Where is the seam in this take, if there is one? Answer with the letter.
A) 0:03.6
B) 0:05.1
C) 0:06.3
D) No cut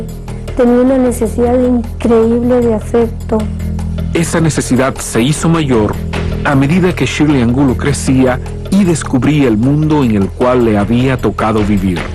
B